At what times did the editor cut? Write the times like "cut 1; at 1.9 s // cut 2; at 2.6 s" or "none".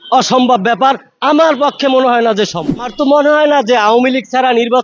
cut 1; at 2.9 s